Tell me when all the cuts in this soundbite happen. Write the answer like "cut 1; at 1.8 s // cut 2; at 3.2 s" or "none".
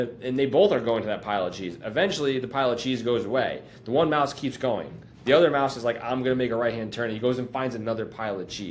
none